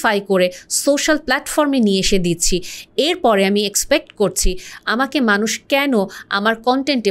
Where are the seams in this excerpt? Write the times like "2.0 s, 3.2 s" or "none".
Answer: none